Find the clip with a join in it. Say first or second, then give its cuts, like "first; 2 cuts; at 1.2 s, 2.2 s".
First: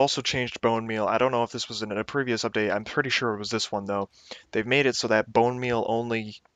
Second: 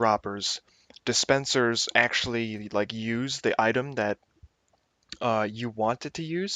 second; 1 cut; at 2.6 s